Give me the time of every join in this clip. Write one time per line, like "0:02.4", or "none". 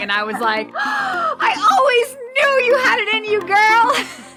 none